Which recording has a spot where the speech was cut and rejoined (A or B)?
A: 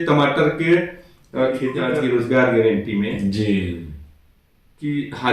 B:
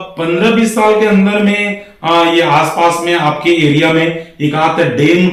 A